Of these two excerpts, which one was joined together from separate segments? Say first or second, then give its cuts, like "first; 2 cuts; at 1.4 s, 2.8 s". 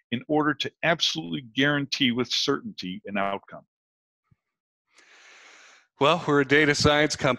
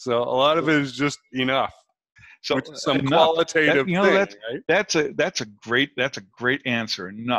second; 1 cut; at 2.2 s